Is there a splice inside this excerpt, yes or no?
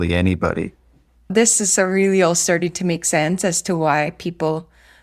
yes